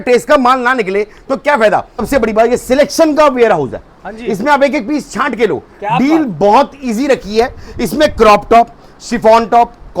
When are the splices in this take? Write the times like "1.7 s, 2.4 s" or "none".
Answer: 1.9 s

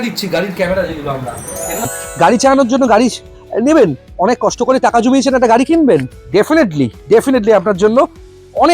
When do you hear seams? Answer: 1.9 s

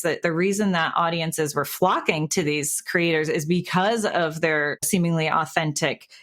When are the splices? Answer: 4.8 s

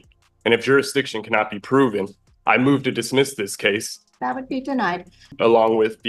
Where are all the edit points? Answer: 3.9 s, 5.3 s

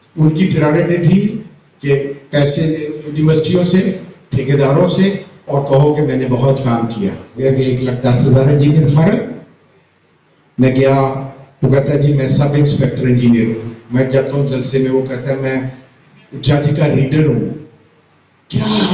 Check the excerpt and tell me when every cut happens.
7.4 s

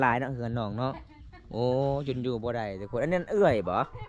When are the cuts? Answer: none

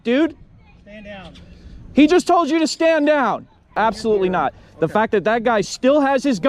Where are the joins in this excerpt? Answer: 3.7 s

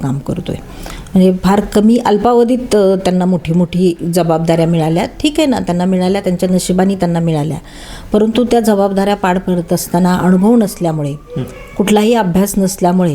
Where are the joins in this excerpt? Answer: none

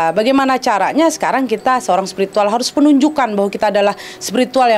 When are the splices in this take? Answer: none

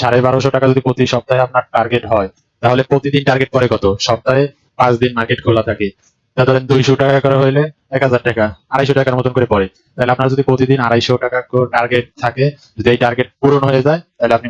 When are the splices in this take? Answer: none

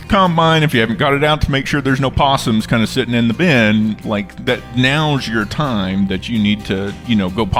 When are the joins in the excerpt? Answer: none

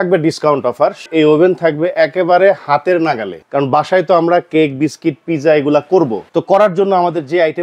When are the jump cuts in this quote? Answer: 1.1 s, 3.4 s, 6.2 s

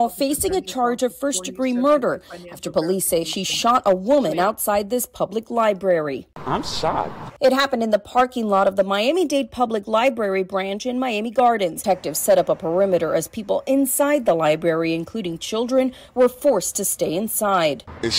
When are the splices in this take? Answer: 11.8 s

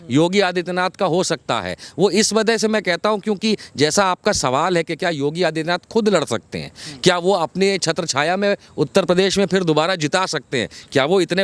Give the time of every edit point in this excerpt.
none

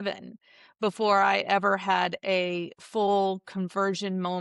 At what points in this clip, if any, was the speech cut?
none

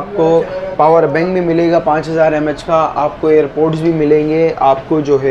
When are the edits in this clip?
none

